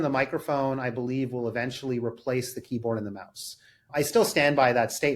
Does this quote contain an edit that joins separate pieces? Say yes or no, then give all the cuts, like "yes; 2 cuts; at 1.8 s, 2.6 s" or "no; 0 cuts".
no; 0 cuts